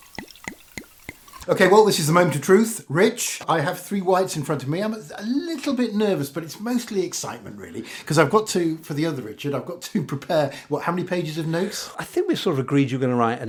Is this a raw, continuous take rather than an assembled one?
yes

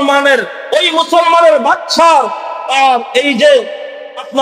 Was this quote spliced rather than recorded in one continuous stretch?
no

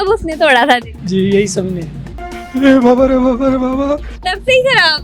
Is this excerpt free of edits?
no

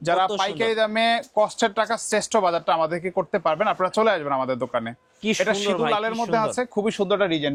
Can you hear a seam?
no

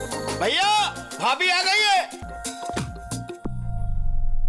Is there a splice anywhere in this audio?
yes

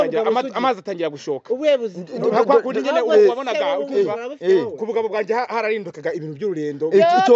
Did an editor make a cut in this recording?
no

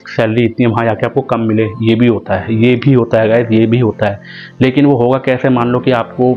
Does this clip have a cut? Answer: no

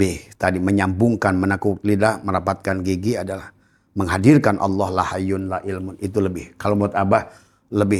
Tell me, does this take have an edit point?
no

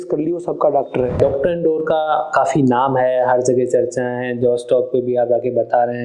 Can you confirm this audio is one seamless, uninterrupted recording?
no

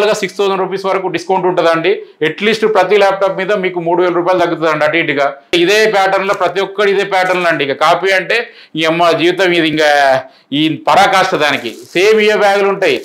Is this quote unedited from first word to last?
no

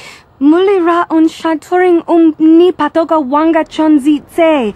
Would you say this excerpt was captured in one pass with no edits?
yes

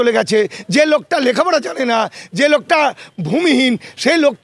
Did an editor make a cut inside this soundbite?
no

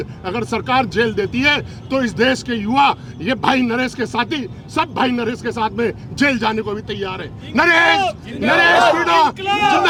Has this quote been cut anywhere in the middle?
no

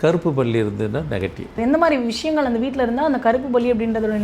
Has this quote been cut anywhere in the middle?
yes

